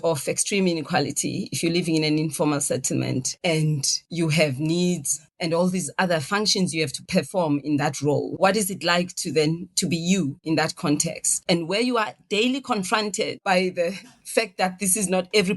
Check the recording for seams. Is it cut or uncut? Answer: cut